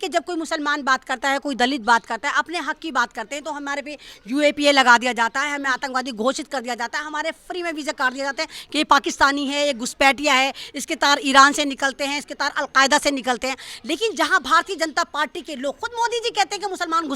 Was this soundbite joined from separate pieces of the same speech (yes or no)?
no